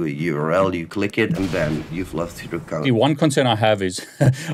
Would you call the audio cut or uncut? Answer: cut